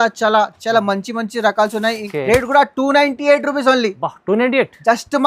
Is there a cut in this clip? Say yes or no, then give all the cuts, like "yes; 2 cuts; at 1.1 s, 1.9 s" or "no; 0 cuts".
yes; 1 cut; at 2.0 s